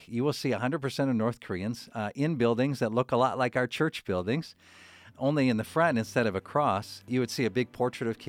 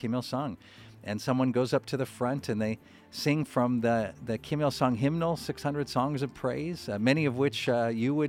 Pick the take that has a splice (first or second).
first